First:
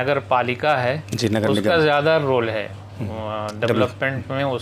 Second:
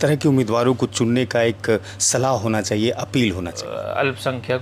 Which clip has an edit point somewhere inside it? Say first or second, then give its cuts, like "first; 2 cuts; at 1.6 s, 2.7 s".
second; 1 cut; at 3.6 s